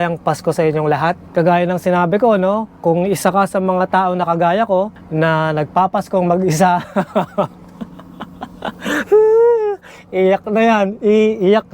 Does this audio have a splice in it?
yes; 1 cut; at 1.3 s

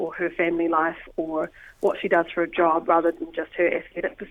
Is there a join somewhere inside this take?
no; 0 cuts

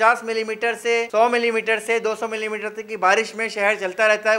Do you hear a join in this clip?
no; 0 cuts

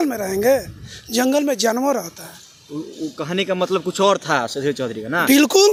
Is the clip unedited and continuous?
yes; 0 cuts

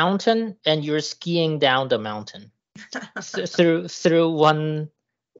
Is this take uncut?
yes; 0 cuts

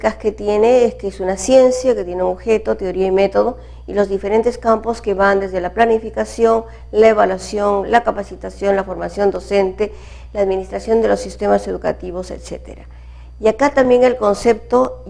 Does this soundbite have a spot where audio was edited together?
yes; 1 cut; at 10.8 s

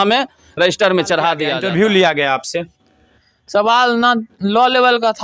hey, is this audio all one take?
no; 1 cut; at 1.5 s

